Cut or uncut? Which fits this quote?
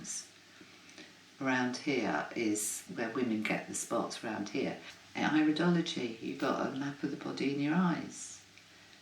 cut